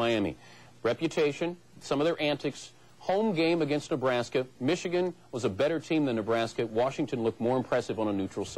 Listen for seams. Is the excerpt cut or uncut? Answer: uncut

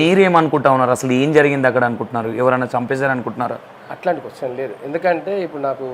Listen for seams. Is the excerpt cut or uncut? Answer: uncut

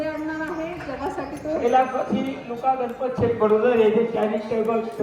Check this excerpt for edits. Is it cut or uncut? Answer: cut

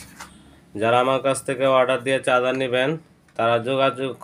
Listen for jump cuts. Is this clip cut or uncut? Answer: uncut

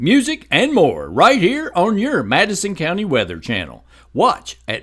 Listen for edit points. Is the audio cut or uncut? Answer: uncut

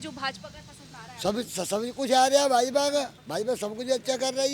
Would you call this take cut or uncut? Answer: cut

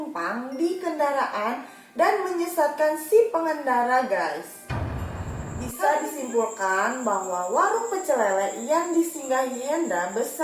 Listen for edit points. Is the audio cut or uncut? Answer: cut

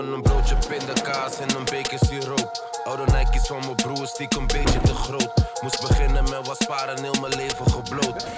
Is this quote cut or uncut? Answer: uncut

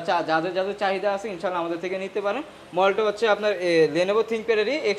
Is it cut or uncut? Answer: uncut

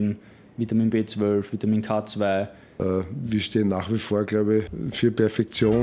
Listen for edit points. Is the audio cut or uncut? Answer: cut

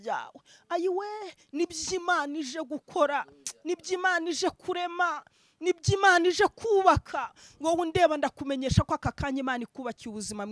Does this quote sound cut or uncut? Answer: uncut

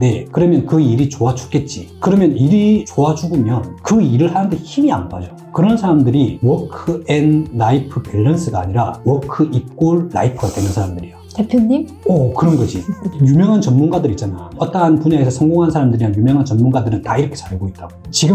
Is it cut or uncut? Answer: uncut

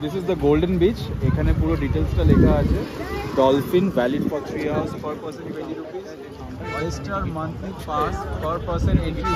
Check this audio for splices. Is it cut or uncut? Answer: uncut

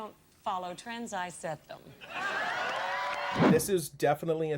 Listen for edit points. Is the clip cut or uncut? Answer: cut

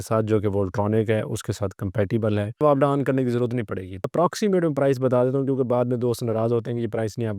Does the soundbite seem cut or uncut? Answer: cut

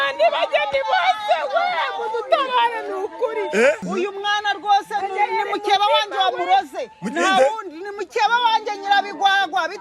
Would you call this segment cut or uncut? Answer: cut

